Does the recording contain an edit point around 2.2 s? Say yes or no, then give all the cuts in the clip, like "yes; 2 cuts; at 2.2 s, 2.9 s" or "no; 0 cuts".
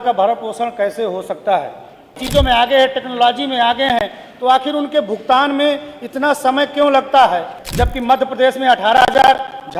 yes; 2 cuts; at 2.2 s, 7.6 s